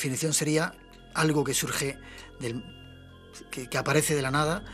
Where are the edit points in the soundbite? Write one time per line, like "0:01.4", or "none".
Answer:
none